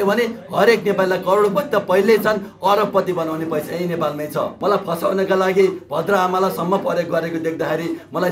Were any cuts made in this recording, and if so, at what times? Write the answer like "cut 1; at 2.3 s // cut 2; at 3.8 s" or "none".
cut 1; at 4.5 s